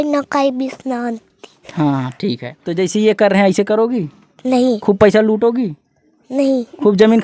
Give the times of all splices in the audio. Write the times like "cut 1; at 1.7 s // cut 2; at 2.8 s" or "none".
cut 1; at 2.6 s